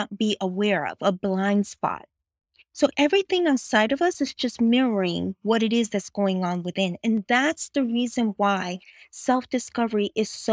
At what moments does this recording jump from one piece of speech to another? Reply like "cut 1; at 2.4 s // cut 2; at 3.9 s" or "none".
none